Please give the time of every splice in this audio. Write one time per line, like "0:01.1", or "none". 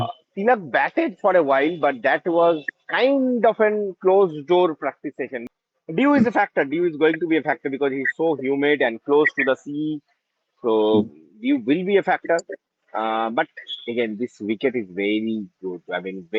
0:05.4